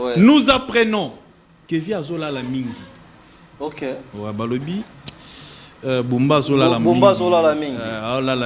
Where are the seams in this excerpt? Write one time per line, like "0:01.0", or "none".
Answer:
none